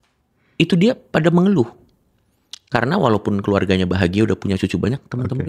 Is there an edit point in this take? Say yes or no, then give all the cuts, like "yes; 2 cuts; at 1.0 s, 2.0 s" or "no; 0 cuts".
no; 0 cuts